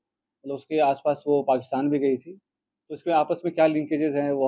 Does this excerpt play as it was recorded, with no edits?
yes; 0 cuts

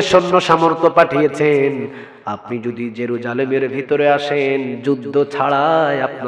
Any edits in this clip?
no; 0 cuts

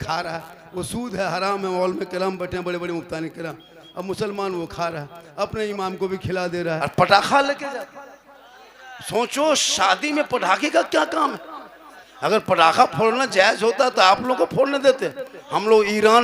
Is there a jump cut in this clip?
yes; 1 cut; at 6.8 s

